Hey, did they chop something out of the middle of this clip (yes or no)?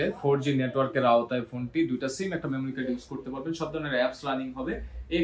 no